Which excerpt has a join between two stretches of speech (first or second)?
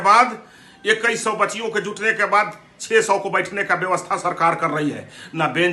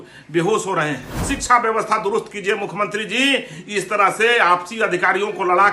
second